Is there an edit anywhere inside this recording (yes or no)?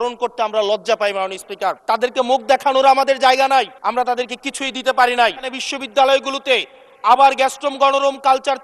yes